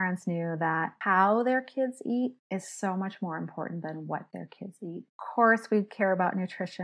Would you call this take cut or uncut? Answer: cut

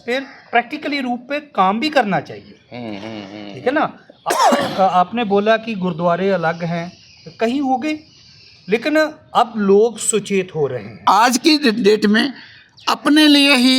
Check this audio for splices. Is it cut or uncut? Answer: cut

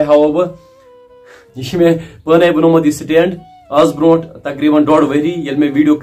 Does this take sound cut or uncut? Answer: uncut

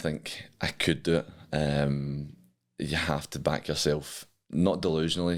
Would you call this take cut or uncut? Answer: uncut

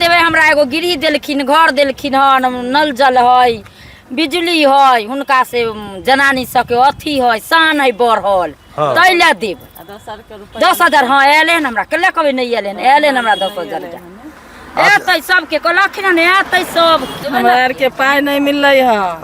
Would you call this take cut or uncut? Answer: cut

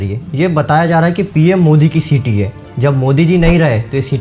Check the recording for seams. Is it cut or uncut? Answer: uncut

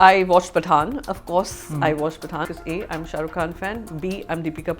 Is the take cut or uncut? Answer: cut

